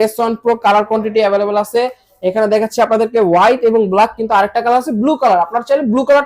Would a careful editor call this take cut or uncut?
uncut